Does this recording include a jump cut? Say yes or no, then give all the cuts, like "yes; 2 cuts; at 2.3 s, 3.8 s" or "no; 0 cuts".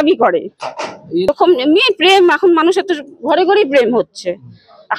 yes; 1 cut; at 1.3 s